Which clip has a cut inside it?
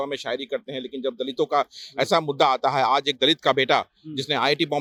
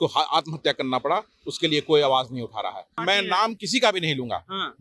second; 1 cut; at 2.9 s

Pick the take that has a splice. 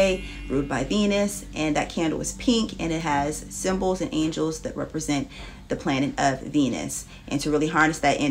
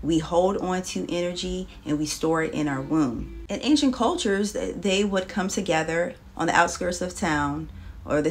second; 1 cut; at 3.5 s

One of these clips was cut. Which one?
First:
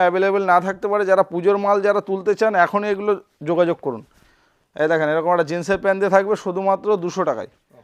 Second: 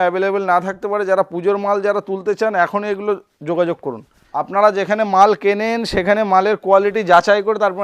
second; 1 cut; at 4.2 s

